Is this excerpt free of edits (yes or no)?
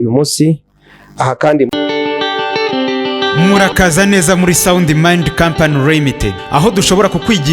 no